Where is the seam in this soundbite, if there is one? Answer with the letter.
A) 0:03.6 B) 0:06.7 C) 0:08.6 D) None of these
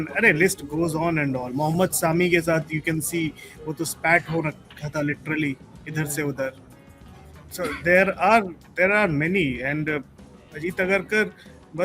D